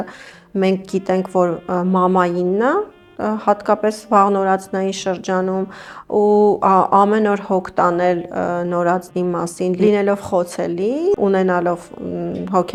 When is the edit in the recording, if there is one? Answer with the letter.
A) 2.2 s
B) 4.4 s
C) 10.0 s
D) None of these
D